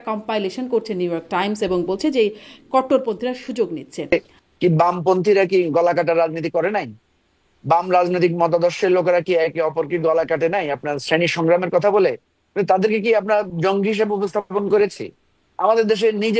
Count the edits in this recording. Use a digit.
1